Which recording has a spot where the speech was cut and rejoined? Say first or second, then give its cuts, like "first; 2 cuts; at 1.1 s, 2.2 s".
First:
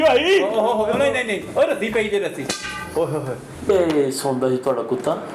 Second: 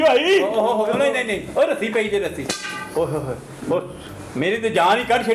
first; 1 cut; at 3.7 s